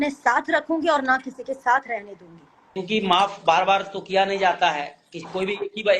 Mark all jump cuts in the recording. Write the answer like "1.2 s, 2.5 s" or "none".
2.8 s